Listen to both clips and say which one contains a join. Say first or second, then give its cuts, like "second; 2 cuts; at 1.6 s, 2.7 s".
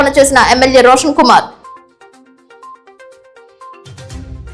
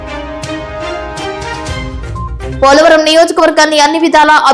first; 1 cut; at 1.6 s